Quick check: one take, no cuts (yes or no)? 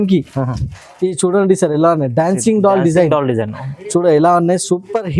yes